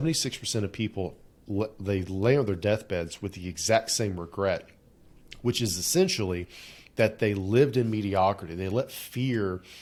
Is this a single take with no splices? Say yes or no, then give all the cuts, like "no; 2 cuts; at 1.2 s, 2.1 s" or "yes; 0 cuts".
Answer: yes; 0 cuts